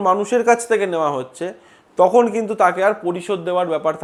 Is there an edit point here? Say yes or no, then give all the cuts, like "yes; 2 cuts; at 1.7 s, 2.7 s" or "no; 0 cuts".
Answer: no; 0 cuts